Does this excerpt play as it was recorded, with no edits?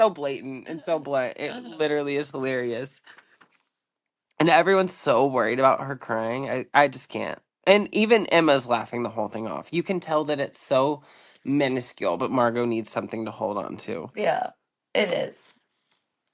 yes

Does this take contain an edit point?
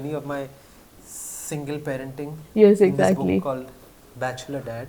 no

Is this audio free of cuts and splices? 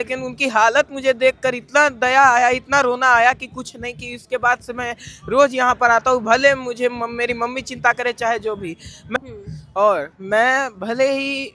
no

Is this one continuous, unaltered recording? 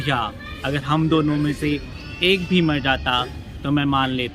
yes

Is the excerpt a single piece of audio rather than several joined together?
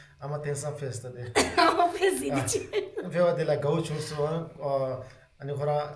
yes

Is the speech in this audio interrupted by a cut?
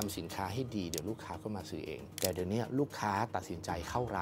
yes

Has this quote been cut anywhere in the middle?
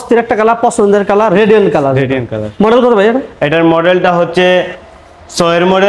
no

